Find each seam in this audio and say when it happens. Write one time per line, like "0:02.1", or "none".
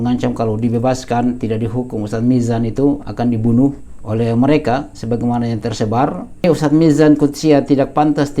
0:06.4